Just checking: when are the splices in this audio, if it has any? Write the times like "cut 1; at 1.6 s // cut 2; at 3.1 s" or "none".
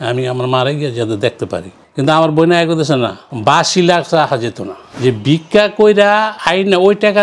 cut 1; at 1.8 s // cut 2; at 4.9 s

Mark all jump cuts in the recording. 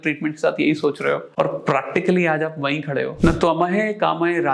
cut 1; at 1.3 s // cut 2; at 3.1 s

